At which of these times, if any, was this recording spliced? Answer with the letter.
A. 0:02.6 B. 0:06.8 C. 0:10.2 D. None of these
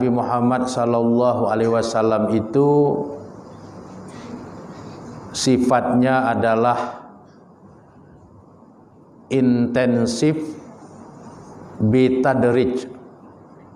D